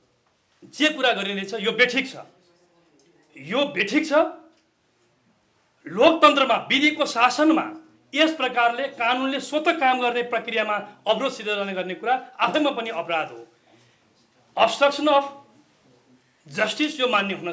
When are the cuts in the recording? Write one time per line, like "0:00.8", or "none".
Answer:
none